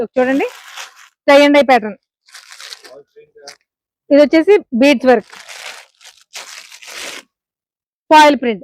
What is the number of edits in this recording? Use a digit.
0